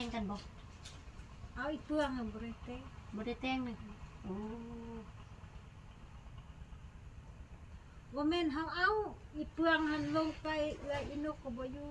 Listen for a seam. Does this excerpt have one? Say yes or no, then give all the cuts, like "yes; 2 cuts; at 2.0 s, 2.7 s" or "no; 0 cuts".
no; 0 cuts